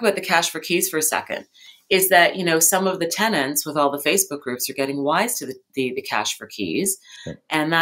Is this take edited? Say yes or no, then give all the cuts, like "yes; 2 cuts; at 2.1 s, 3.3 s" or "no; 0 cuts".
no; 0 cuts